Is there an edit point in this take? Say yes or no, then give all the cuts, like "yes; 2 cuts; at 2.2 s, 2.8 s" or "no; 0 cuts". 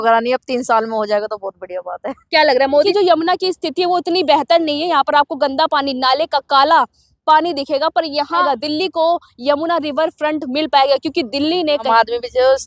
yes; 3 cuts; at 2.9 s, 8.4 s, 11.9 s